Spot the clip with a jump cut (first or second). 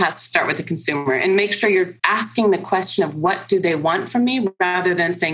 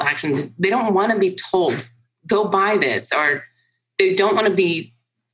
first